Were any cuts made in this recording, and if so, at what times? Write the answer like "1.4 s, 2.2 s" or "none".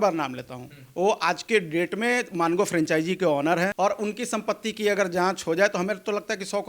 3.7 s